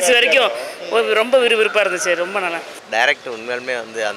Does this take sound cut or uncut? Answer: cut